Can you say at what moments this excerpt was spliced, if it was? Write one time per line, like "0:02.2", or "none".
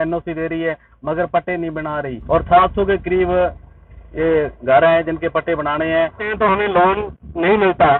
0:02.1
0:06.2